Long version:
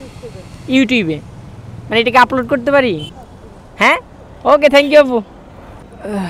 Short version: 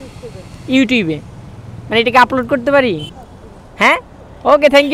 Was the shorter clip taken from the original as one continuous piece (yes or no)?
yes